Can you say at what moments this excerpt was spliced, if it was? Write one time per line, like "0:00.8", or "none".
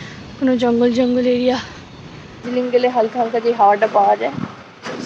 0:02.5